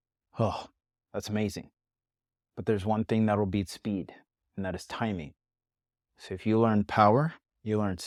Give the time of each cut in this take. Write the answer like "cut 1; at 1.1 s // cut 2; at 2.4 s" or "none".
none